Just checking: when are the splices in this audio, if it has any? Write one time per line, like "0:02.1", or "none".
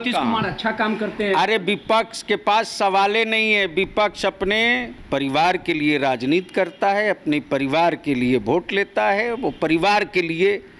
0:04.9